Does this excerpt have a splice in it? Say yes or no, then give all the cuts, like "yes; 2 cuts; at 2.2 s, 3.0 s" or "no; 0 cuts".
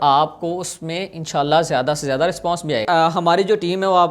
yes; 1 cut; at 2.8 s